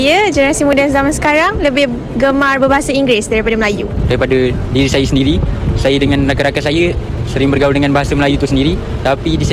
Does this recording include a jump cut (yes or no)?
no